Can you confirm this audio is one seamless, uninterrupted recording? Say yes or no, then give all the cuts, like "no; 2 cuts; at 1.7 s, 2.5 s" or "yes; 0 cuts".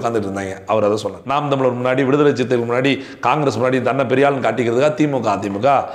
no; 1 cut; at 1.2 s